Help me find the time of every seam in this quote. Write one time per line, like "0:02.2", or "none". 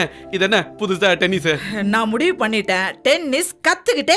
none